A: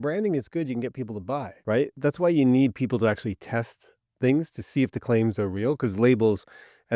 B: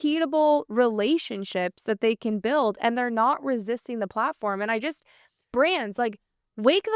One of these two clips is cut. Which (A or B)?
A